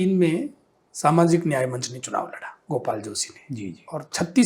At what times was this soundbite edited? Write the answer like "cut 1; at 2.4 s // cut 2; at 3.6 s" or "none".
cut 1; at 2.6 s